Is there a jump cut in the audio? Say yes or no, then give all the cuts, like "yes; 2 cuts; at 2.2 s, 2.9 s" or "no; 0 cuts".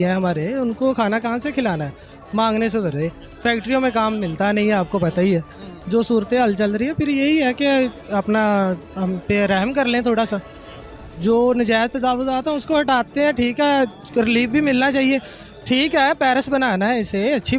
no; 0 cuts